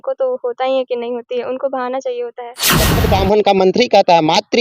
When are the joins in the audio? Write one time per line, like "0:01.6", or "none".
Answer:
0:03.0